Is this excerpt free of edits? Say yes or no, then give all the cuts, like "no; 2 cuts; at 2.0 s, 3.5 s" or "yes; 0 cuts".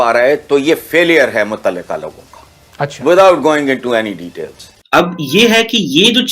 no; 1 cut; at 4.8 s